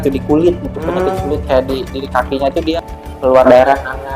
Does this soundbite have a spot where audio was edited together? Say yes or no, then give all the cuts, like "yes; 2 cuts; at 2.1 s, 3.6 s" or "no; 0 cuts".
yes; 1 cut; at 2.7 s